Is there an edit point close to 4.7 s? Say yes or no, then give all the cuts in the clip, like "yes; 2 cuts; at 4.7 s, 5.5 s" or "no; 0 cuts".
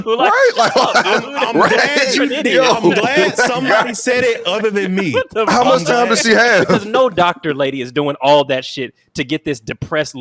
no; 1 cut; at 6.9 s